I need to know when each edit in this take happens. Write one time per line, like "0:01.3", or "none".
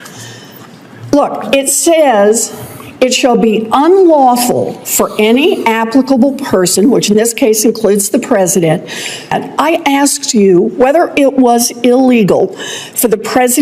0:09.3